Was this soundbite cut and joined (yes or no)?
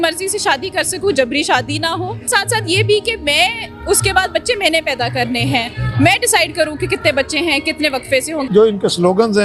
yes